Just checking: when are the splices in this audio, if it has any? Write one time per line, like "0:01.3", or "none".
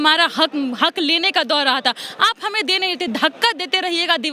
none